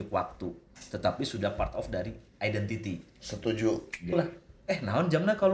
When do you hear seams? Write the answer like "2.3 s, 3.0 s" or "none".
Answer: 4.1 s